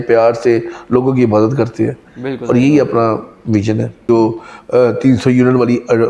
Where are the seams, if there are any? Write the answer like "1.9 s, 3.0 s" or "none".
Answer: 4.1 s